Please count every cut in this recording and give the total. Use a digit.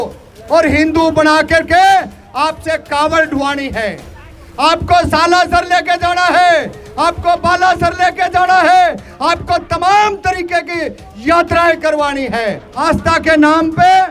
1